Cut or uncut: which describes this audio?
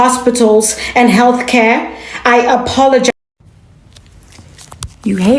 cut